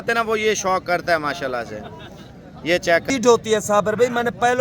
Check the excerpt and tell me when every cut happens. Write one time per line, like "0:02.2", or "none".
0:03.1